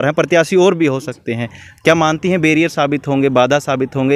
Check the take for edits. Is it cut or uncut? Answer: uncut